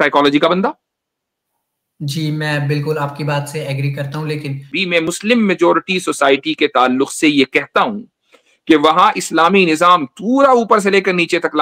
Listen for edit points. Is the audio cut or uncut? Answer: cut